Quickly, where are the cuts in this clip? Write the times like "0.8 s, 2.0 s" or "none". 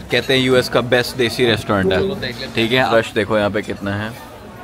2.9 s